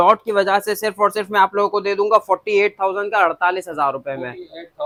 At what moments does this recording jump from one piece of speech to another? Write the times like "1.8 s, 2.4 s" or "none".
none